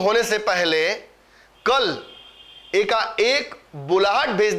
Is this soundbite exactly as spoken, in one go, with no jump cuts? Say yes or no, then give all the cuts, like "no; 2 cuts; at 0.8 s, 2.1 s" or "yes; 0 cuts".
yes; 0 cuts